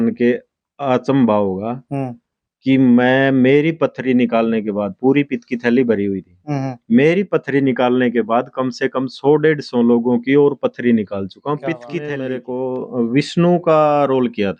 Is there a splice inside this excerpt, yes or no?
yes